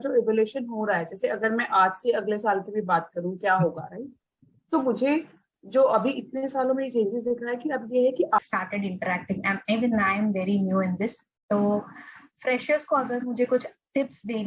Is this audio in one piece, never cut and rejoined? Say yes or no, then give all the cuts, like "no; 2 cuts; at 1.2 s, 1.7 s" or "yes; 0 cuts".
no; 1 cut; at 8.4 s